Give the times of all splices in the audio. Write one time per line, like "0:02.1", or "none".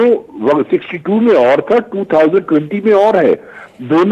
none